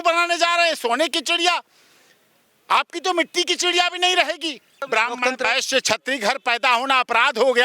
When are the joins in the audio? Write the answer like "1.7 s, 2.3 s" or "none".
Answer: 4.8 s

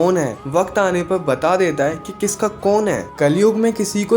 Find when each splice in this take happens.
3.1 s

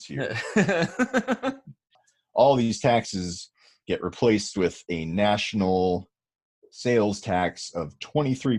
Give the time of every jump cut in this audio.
1.9 s

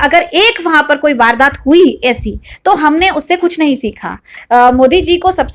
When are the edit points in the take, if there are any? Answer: 4.3 s

